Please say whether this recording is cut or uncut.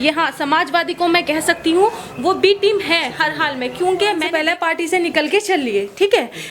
cut